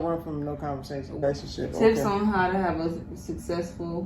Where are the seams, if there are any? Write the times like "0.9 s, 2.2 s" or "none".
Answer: 1.2 s

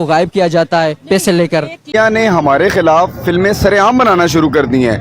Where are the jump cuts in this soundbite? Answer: 1.8 s

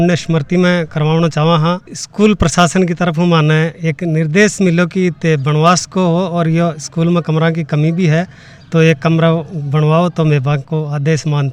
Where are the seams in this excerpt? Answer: none

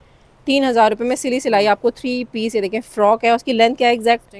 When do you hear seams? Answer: none

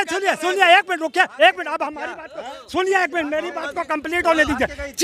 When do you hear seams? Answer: none

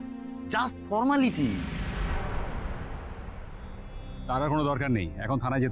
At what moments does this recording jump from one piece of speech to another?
1.7 s, 3.3 s

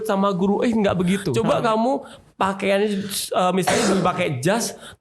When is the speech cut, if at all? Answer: 1.3 s

